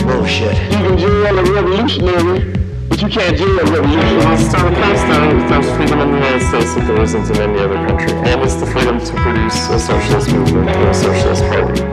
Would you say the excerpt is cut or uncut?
uncut